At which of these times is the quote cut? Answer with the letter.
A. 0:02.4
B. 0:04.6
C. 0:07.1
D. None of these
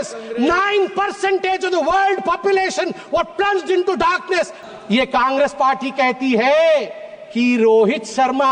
B